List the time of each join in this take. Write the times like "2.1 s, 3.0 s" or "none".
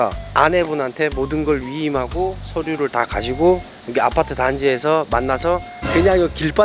5.7 s

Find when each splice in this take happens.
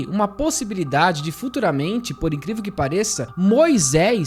none

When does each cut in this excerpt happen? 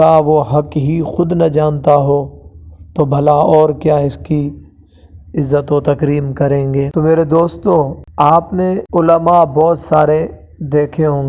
6.9 s, 8.0 s, 8.8 s

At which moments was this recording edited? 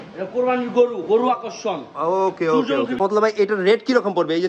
3.0 s

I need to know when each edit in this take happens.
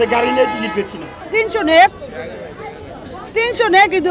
1.2 s

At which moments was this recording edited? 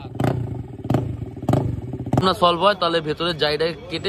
2.2 s

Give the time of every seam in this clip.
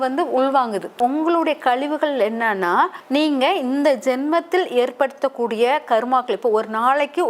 1.0 s, 3.0 s

